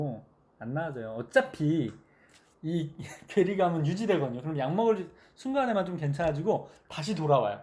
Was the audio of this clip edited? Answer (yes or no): no